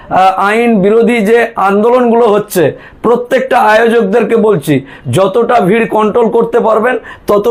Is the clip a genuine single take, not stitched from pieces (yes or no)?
yes